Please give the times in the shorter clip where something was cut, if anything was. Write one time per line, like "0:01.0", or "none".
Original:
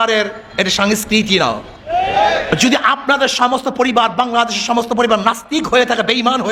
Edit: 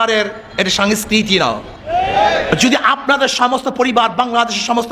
none